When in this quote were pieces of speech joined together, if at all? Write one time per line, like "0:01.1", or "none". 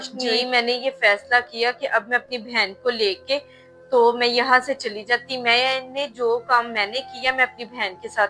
none